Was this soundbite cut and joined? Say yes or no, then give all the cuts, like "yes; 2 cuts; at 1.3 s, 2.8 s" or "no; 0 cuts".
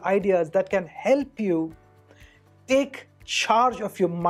no; 0 cuts